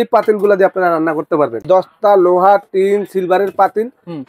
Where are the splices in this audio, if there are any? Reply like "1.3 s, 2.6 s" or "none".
1.6 s